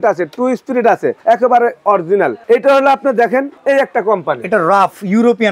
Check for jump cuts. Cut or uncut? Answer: cut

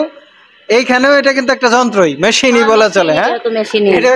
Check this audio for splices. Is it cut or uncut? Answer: uncut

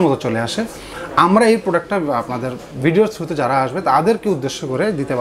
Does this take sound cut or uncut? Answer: uncut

